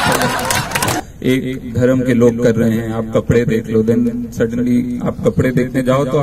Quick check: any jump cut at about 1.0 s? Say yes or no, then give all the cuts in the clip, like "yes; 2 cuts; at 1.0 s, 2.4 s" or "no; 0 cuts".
yes; 1 cut; at 1.0 s